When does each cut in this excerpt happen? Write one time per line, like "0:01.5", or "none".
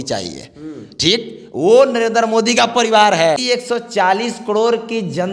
0:03.4